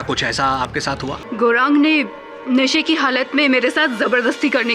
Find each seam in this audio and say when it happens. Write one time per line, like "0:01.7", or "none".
0:01.2